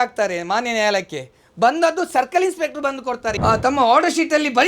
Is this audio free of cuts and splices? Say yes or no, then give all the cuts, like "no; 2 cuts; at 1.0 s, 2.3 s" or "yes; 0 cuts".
no; 1 cut; at 3.3 s